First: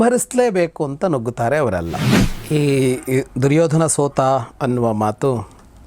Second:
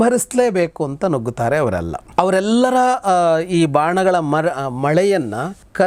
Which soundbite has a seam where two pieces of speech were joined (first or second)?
first